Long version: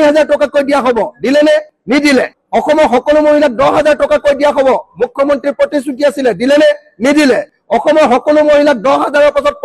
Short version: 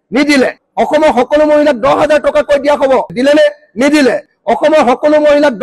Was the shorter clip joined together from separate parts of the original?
yes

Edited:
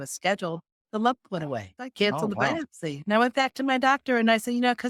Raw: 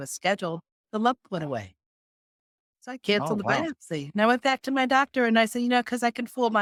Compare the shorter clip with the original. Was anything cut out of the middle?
yes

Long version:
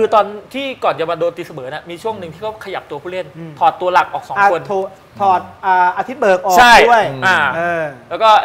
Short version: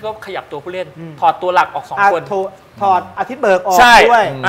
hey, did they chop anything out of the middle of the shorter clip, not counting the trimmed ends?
yes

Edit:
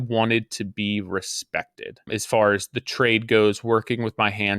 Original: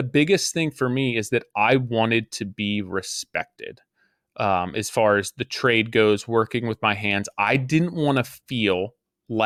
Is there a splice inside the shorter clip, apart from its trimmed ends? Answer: yes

